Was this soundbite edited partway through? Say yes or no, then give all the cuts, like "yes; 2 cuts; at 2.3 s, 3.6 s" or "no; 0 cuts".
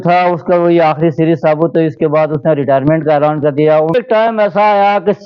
yes; 1 cut; at 3.9 s